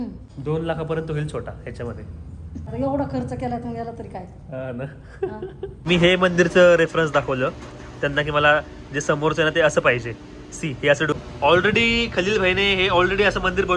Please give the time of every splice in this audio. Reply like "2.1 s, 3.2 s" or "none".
2.7 s, 5.8 s, 11.1 s